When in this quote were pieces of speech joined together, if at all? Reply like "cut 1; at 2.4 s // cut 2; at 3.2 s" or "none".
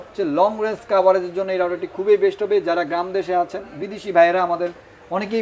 none